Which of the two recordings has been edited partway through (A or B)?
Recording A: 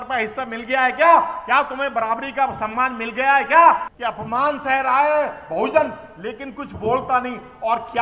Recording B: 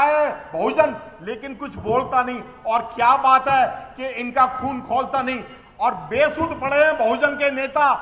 A